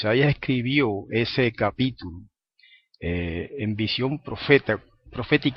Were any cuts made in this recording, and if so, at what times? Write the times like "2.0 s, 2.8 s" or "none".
3.4 s